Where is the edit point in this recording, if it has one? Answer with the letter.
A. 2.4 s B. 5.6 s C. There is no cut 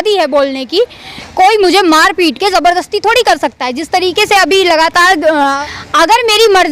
B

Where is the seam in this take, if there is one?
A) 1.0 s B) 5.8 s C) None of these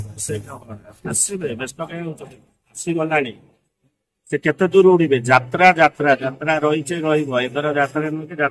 C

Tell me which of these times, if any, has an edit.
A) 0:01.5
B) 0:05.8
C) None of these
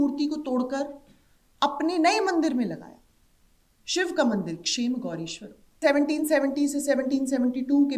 B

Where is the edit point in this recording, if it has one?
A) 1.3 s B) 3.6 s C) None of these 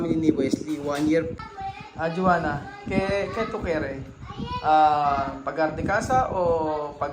A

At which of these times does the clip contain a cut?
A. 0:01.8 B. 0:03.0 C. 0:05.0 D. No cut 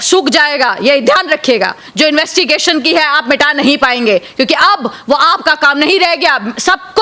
A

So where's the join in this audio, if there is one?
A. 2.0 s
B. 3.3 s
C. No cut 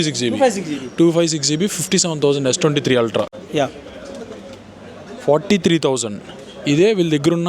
B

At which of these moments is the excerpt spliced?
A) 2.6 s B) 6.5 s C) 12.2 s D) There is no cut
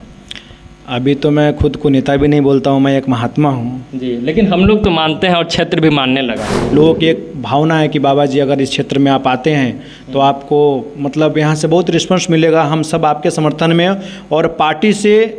B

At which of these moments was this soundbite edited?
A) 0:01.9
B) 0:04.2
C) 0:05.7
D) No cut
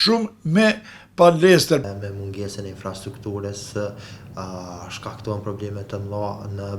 A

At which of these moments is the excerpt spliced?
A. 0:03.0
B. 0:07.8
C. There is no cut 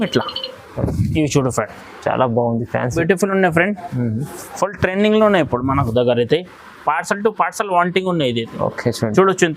A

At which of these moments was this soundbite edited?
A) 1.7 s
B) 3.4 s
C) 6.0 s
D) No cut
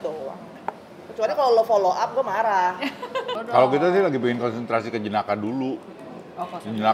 B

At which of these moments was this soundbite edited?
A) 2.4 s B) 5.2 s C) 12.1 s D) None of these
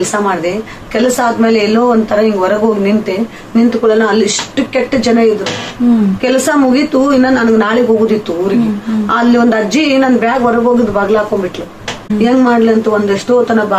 C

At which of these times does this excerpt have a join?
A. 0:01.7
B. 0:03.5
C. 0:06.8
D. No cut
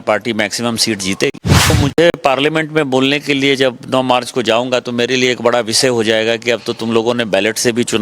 A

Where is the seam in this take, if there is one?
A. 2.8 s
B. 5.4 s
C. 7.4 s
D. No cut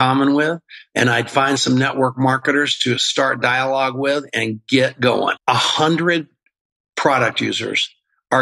B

